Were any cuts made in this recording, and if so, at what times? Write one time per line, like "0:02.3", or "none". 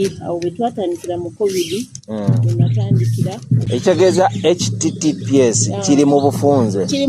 0:03.7